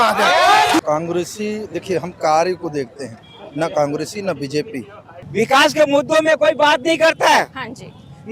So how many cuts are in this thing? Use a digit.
2